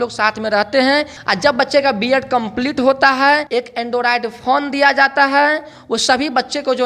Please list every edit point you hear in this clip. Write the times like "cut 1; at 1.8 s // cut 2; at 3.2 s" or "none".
cut 1; at 1.2 s // cut 2; at 3.5 s